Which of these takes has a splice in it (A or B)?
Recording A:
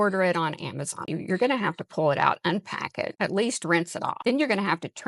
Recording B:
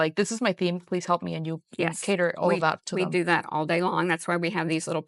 A